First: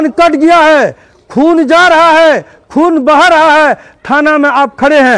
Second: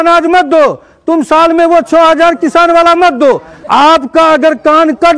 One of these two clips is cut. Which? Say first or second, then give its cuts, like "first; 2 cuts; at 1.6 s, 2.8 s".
second; 1 cut; at 3.5 s